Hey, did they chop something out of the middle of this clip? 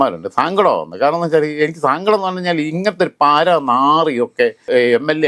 no; 0 cuts

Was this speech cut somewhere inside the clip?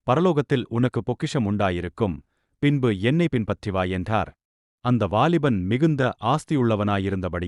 no; 0 cuts

